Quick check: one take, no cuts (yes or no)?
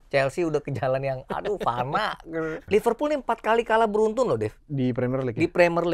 no